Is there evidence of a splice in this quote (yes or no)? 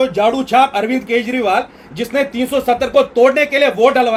no